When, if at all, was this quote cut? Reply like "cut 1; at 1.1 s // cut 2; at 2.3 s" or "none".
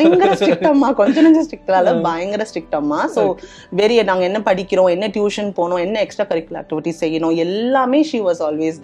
none